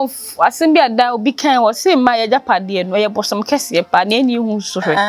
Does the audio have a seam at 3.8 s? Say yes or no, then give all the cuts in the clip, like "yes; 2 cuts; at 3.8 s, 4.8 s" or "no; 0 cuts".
no; 0 cuts